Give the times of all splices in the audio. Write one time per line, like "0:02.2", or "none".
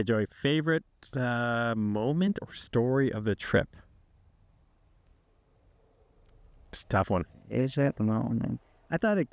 none

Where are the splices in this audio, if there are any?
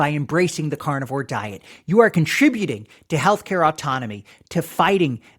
none

